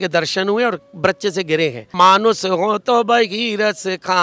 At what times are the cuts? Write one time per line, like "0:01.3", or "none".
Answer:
0:01.9